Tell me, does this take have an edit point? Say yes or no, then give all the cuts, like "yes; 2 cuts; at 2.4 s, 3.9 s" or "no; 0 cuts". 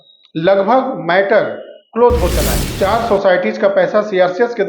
yes; 1 cut; at 2.6 s